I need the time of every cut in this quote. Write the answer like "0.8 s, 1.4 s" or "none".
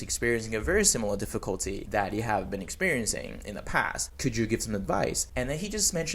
1.8 s, 4.1 s, 5.2 s